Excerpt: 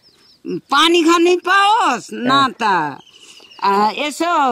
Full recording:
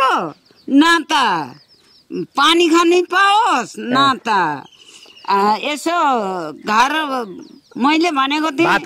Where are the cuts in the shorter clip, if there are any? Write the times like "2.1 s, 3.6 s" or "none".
none